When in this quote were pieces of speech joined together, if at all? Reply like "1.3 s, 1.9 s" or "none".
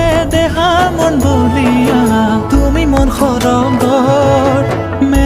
2.6 s